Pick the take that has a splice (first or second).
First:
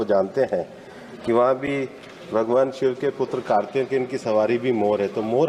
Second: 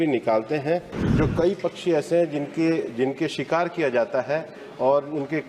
second